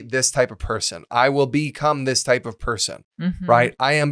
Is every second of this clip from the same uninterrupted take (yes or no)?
yes